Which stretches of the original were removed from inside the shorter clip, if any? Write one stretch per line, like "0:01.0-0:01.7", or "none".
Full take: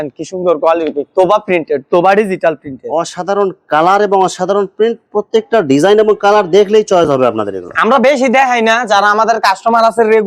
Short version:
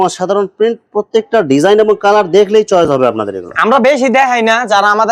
none